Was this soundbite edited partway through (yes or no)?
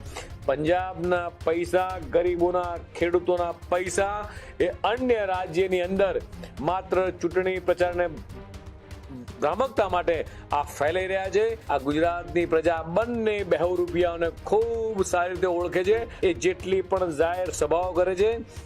yes